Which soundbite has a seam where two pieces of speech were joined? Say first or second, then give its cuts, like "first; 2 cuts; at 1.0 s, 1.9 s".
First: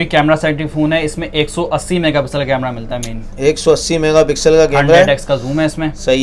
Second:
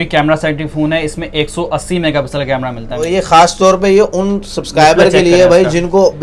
second; 1 cut; at 3.1 s